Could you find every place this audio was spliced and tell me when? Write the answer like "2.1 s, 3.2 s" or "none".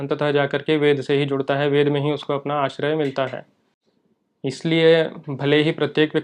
none